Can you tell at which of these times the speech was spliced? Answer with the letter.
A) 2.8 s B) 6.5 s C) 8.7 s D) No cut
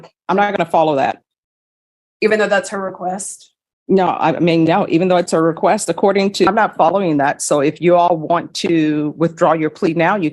B